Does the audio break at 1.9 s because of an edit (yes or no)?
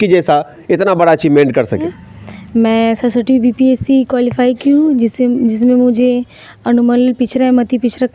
yes